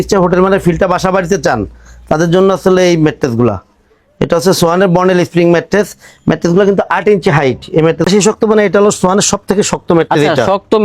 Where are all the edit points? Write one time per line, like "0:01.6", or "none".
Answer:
0:08.1